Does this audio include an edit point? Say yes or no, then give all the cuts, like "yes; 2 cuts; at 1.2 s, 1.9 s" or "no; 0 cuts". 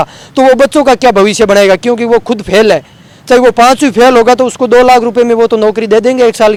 no; 0 cuts